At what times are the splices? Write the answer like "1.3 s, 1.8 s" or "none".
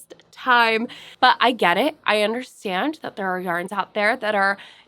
1.0 s